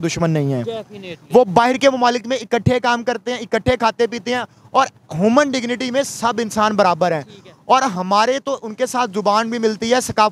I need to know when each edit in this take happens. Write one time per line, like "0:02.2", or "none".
none